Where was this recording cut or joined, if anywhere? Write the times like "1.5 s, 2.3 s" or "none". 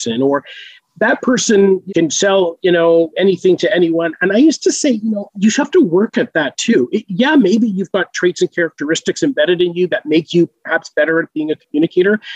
1.8 s, 5.3 s